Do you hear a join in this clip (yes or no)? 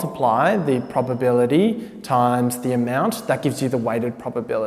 no